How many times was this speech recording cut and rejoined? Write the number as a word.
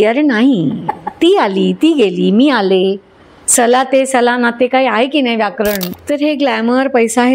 one